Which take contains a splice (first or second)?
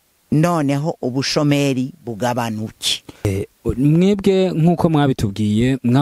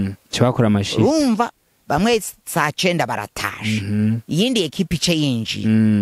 first